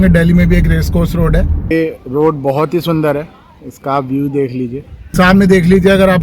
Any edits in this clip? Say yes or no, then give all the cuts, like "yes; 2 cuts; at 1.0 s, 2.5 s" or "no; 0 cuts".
yes; 2 cuts; at 1.7 s, 5.0 s